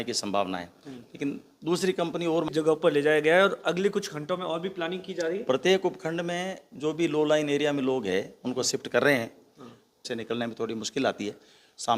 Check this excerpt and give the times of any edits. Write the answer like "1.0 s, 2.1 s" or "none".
2.5 s, 10.1 s